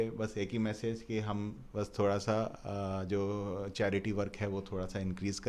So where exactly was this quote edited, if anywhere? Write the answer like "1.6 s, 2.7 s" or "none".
none

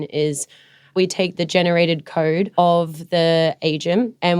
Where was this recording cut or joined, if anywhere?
2.5 s

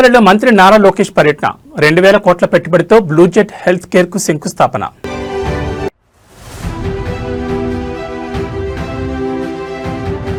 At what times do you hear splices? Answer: none

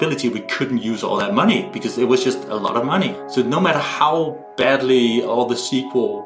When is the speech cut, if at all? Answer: 3.2 s

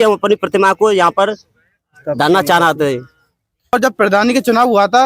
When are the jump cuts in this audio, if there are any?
3.7 s

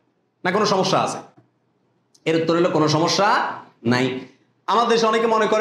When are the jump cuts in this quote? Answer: none

